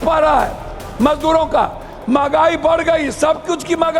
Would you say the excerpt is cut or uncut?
uncut